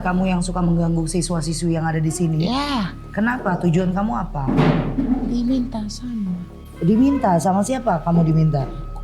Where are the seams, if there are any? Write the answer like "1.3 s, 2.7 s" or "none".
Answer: none